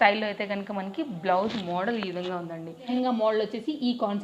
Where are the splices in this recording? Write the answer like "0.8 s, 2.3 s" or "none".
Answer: 2.9 s